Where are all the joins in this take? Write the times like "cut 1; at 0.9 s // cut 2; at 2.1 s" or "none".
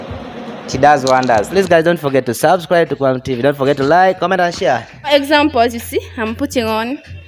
cut 1; at 1.5 s // cut 2; at 5.0 s